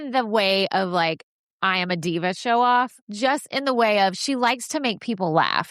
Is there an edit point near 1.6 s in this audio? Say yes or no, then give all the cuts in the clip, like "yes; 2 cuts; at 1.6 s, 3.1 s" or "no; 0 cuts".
no; 1 cut; at 3.0 s